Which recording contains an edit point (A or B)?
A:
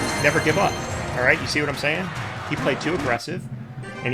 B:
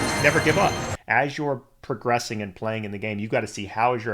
B